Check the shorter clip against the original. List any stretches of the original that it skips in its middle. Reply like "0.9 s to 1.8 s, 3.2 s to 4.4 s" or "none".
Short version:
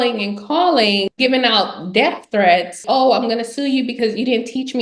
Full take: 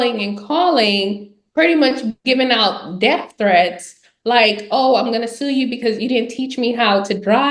1.1 s to 2.2 s, 3.8 s to 4.6 s